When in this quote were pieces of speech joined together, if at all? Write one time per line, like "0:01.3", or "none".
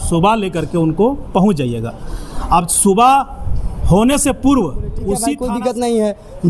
0:05.3